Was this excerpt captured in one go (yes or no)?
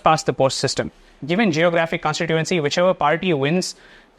no